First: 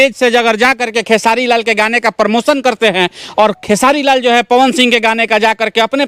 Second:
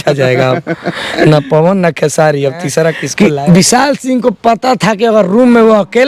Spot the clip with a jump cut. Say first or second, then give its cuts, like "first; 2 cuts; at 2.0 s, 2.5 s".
second; 1 cut; at 3.0 s